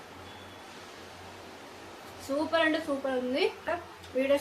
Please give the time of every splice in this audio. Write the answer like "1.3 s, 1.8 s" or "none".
3.4 s